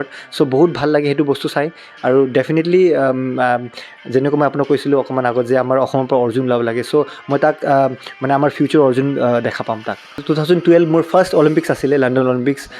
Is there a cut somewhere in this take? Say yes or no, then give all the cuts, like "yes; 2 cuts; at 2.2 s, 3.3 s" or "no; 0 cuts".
yes; 1 cut; at 10.2 s